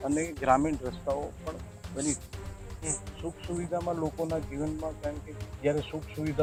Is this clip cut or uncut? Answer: uncut